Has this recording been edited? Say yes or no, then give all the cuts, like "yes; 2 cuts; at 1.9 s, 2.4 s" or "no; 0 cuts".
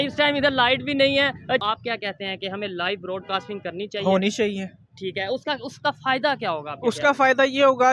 yes; 1 cut; at 1.6 s